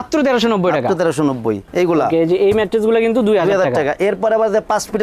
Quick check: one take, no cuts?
no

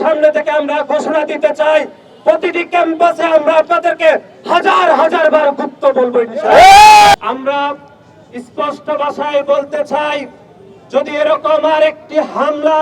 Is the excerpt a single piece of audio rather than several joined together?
no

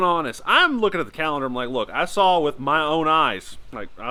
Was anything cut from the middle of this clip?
no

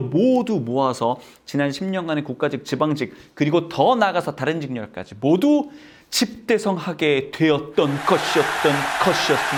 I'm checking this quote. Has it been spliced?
no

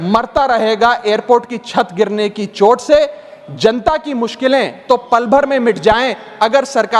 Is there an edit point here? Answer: no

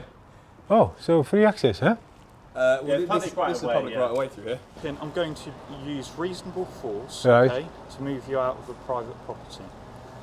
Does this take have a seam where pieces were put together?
yes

